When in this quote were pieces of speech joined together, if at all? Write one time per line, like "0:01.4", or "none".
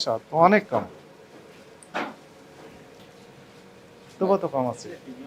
0:03.0

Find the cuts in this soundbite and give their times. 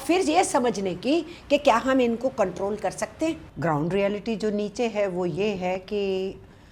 0:03.5

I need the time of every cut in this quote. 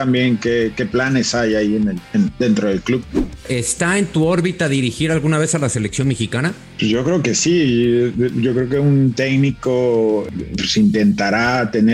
0:03.3
0:06.6
0:10.3

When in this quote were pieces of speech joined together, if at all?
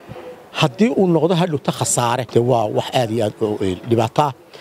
0:02.2

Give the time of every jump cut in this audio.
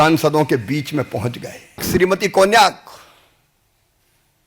0:01.8

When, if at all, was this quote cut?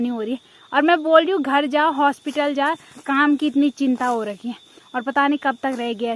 0:02.9

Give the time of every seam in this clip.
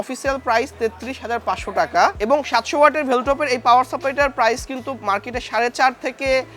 none

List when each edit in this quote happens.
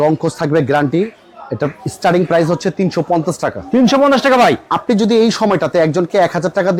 none

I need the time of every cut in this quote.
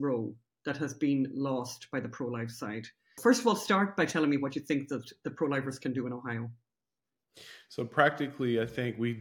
0:03.2

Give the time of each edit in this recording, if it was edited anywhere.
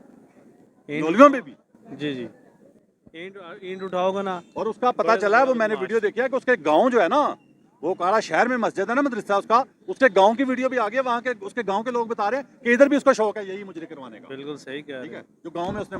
none

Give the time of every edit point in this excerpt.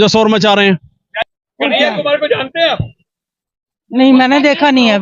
0:01.3

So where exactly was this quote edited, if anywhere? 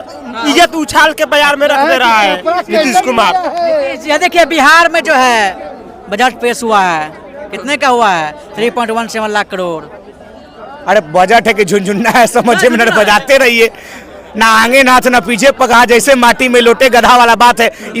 none

